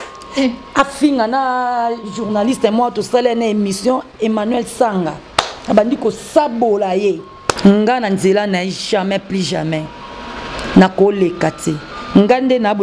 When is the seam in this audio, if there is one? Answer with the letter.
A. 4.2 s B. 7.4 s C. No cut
B